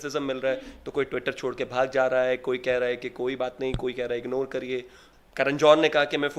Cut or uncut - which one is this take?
uncut